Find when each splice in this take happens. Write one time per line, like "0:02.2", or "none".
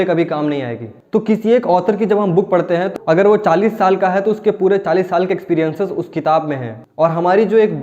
0:00.9
0:03.0
0:06.8

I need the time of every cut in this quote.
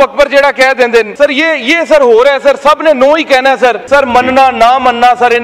0:01.1
0:03.8

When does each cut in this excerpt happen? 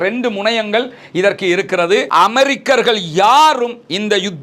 0:02.1

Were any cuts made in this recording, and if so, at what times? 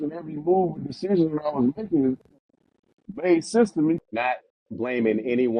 0:04.0

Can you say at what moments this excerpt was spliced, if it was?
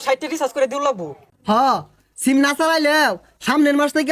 none

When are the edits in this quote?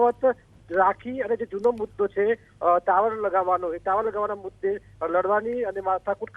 0:02.8

